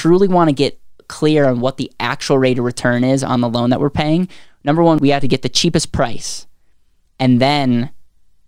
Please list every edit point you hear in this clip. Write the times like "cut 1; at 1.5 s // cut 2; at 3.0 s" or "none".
cut 1; at 5.0 s